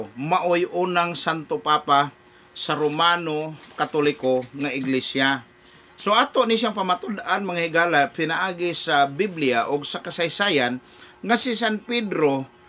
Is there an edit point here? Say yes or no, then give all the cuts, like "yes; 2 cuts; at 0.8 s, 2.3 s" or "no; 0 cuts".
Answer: no; 0 cuts